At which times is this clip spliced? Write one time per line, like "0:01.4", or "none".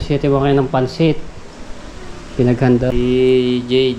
0:02.9